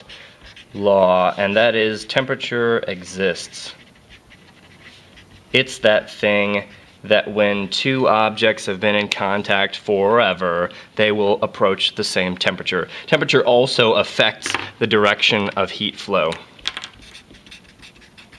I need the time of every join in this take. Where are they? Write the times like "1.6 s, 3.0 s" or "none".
12.5 s